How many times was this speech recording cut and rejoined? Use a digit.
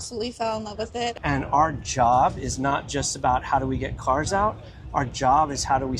1